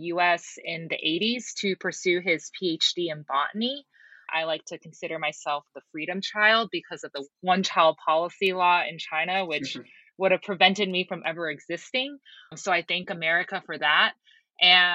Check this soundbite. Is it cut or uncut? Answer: cut